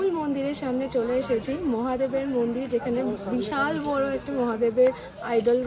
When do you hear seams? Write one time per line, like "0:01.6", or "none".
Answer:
none